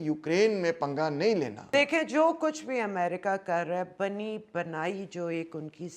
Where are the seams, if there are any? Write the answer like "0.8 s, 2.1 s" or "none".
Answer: 1.7 s